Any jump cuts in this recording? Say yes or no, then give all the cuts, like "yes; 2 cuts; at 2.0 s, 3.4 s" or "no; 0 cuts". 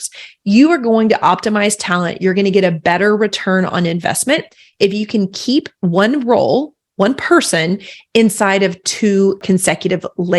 yes; 2 cuts; at 5.7 s, 9.4 s